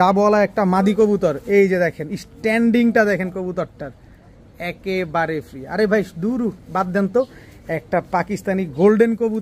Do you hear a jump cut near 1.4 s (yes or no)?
no